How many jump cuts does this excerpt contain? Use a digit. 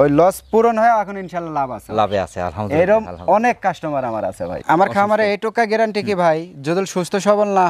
1